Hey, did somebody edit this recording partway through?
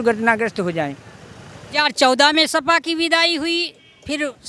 yes; 1 cut; at 1.8 s

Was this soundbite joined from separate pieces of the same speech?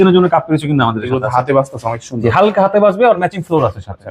no; 0 cuts

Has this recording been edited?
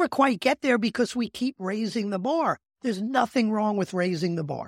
yes; 1 cut; at 2.7 s

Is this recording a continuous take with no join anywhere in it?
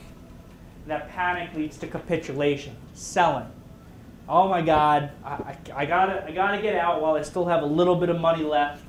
yes; 0 cuts

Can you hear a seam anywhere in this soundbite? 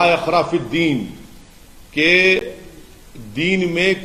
no; 0 cuts

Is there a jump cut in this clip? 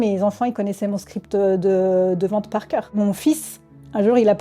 yes; 1 cut; at 3.0 s

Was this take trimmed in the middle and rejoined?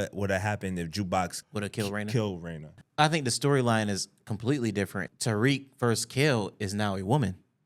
yes; 2 cuts; at 2.8 s, 5.1 s

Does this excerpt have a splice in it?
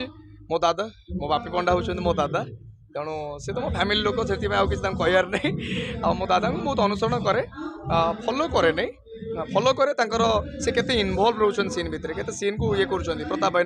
no; 0 cuts

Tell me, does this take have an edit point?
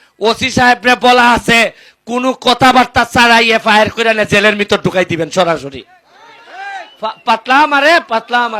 yes; 1 cut; at 6.9 s

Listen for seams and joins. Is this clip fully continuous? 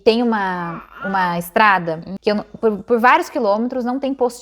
no; 1 cut; at 2.1 s

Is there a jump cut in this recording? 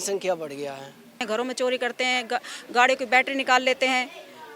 yes; 1 cut; at 1.2 s

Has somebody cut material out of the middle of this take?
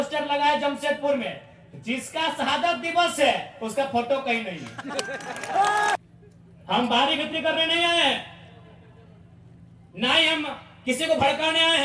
yes; 1 cut; at 6.0 s

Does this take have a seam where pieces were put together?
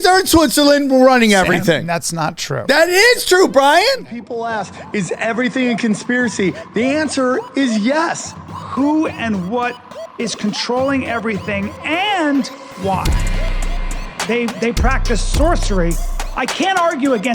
yes; 1 cut; at 4.0 s

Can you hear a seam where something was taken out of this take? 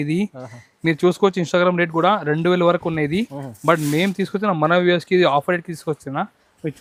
no; 0 cuts

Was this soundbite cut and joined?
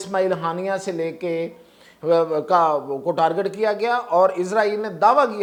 no; 0 cuts

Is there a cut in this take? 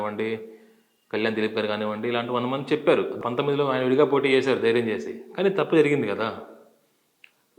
yes; 1 cut; at 3.1 s

